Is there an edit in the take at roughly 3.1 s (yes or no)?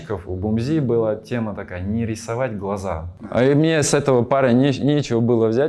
yes